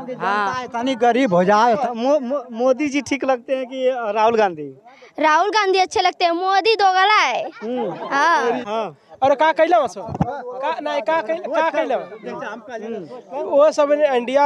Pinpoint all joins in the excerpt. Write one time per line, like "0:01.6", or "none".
0:01.8
0:08.6